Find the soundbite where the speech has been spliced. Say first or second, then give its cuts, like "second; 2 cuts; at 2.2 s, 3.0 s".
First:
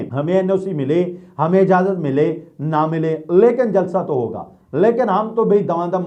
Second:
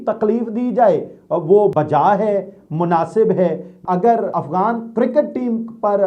second; 1 cut; at 3.8 s